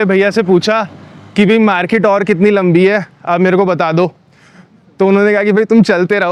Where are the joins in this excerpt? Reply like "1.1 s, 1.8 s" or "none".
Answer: none